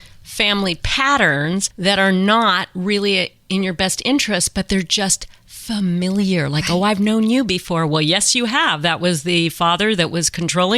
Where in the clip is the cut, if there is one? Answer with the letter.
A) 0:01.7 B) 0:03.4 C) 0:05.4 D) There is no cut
A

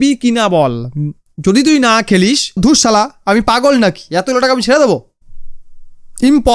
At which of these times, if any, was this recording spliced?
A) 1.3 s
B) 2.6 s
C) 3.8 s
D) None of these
B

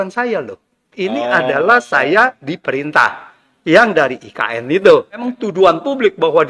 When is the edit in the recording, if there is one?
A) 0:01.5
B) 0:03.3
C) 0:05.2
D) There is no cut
C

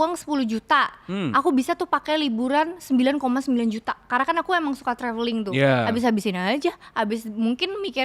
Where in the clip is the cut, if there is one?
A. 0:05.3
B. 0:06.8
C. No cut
C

